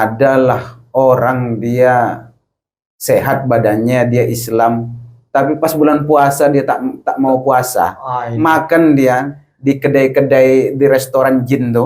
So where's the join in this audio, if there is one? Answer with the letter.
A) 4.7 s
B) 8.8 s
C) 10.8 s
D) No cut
D